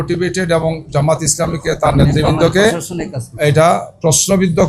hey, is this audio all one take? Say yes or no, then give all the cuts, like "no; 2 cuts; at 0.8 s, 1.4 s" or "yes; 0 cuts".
yes; 0 cuts